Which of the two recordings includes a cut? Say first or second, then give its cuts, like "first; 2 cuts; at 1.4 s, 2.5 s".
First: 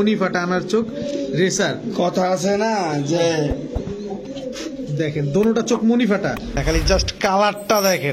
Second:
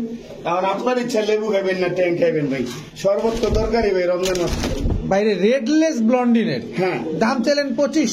first; 1 cut; at 6.5 s